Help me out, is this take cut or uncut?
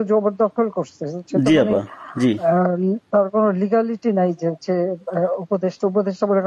uncut